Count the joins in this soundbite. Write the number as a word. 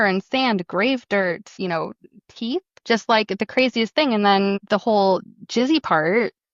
zero